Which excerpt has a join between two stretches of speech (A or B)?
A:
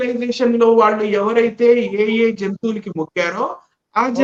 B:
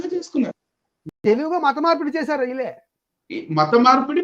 B